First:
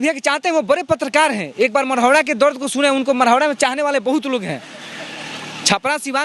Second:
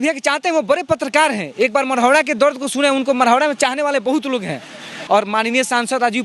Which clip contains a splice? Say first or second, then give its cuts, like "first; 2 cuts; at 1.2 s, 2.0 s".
second; 1 cut; at 4.9 s